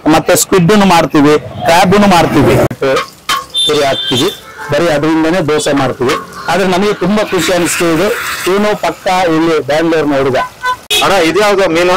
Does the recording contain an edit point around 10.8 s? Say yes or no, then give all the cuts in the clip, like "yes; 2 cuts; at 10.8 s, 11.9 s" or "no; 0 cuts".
yes; 2 cuts; at 2.7 s, 10.8 s